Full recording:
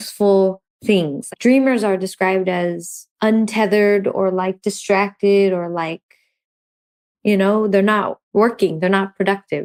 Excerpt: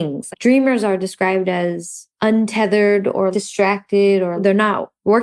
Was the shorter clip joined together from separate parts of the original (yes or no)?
yes